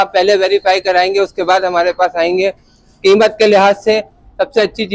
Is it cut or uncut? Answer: uncut